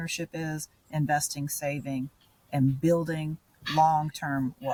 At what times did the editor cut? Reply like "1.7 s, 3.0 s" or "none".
none

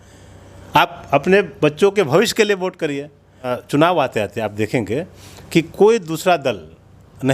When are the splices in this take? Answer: 3.6 s

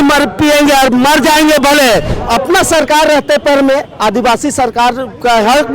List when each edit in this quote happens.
2.2 s

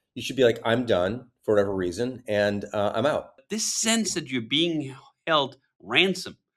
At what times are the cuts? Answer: 3.4 s

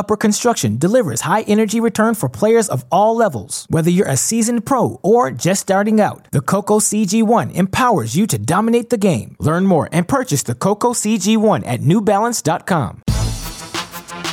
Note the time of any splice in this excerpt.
13.0 s

